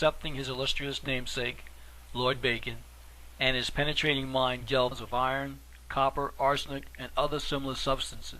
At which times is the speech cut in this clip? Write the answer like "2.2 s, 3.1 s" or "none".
none